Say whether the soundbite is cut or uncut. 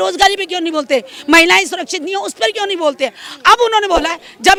uncut